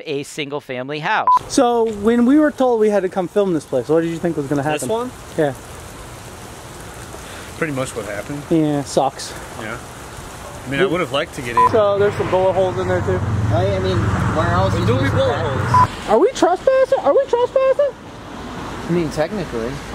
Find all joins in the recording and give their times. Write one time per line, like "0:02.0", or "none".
0:01.2
0:11.7
0:15.9